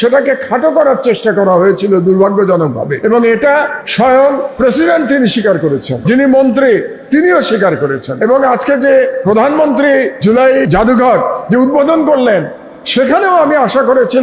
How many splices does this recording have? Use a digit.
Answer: 7